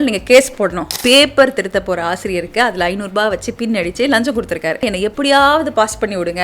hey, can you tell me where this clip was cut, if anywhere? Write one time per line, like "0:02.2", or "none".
0:00.9
0:04.9